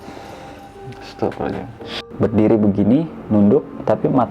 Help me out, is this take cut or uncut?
cut